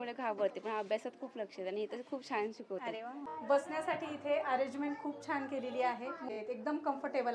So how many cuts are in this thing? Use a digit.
2